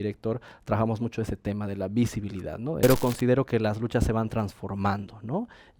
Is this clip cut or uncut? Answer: cut